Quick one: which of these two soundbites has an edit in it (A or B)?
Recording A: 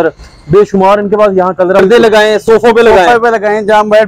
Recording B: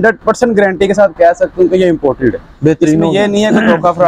A